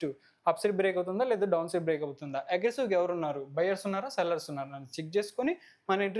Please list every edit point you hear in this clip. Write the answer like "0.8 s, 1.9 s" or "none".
none